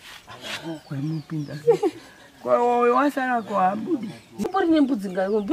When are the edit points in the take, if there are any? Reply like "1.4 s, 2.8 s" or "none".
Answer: 4.4 s